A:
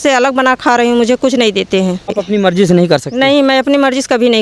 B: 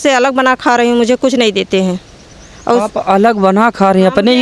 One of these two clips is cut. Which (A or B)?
A